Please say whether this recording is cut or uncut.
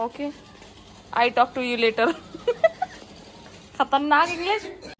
uncut